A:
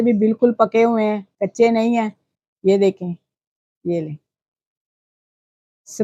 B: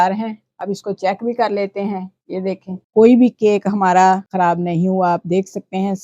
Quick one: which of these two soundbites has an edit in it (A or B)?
B